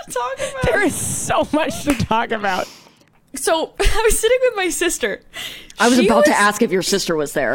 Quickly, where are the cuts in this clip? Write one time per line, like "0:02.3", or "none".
0:03.0